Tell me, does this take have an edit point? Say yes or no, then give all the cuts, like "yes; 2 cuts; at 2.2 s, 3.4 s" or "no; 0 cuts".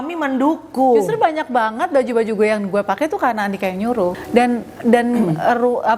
yes; 1 cut; at 4.1 s